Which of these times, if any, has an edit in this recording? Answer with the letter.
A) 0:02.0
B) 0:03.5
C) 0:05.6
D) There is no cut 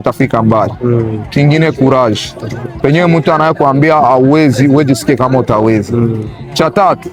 D